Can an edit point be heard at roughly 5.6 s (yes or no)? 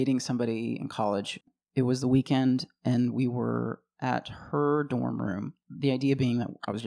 yes